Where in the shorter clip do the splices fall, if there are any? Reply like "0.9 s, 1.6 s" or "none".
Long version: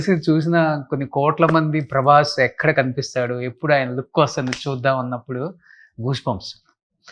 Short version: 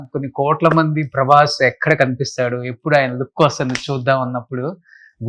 none